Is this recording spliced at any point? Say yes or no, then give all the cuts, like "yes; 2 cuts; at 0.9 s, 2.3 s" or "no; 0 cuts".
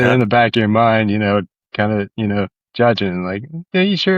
no; 0 cuts